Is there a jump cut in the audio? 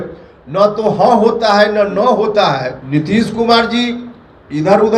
yes; 1 cut; at 2.8 s

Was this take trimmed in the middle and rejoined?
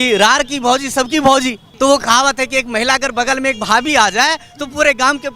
yes; 1 cut; at 1.6 s

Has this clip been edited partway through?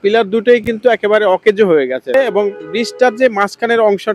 yes; 1 cut; at 2.1 s

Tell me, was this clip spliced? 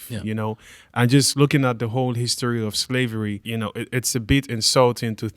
yes; 1 cut; at 3.4 s

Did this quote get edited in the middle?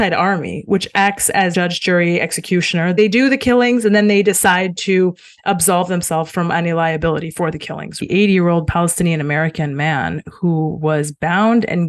yes; 3 cuts; at 1.5 s, 3.0 s, 8.0 s

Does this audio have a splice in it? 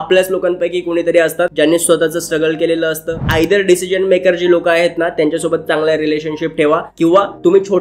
yes; 2 cuts; at 1.5 s, 3.2 s

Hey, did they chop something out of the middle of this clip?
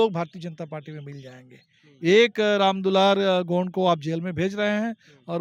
no; 0 cuts

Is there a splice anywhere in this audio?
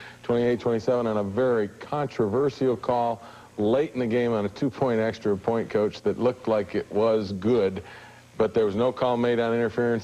no; 0 cuts

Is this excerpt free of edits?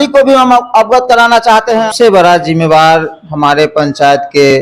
no; 1 cut; at 1.9 s

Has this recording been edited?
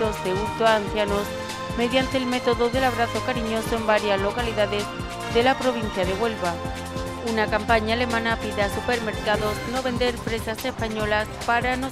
no; 0 cuts

